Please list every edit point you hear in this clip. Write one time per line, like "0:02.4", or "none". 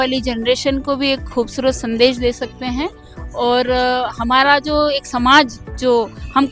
none